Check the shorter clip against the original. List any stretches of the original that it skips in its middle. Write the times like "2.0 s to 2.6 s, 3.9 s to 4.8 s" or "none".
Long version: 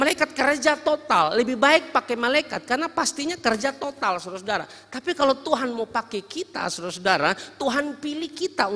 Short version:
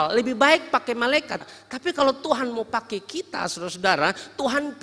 2.6 s to 4.6 s